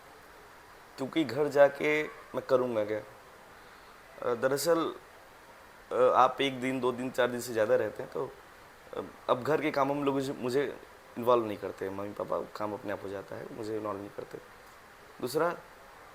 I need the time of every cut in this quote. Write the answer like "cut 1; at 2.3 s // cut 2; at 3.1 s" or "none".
none